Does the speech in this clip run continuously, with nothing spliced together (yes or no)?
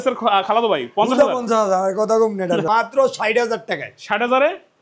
no